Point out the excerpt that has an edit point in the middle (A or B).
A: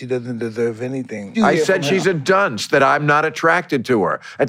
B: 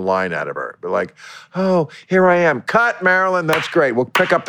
A